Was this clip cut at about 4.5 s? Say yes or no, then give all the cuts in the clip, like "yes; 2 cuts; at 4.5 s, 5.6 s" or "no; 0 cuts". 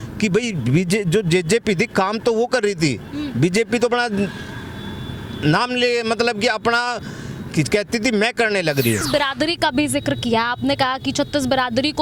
no; 1 cut; at 9.1 s